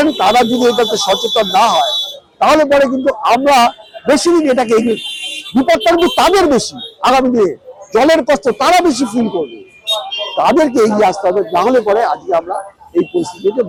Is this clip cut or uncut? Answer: uncut